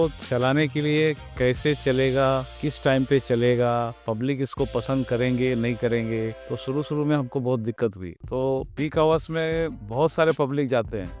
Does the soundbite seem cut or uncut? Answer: uncut